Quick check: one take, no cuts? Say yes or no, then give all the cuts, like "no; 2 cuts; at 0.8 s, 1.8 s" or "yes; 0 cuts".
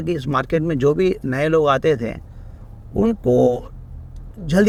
yes; 0 cuts